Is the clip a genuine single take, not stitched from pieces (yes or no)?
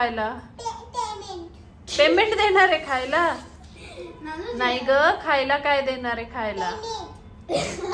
yes